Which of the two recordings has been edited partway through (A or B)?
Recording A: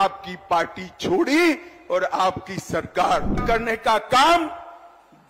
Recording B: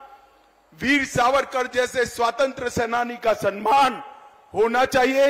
A